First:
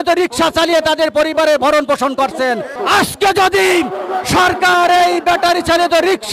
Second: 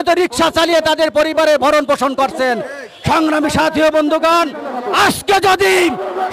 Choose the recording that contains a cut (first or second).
first